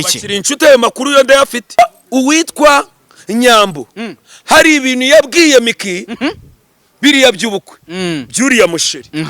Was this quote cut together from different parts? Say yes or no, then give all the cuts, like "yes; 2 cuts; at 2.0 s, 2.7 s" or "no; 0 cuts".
yes; 1 cut; at 1.8 s